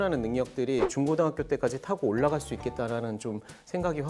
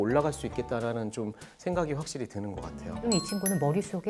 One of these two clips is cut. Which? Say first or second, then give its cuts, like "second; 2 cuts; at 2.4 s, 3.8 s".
second; 1 cut; at 3.0 s